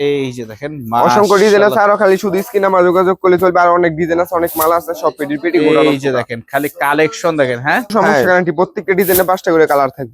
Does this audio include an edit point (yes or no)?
yes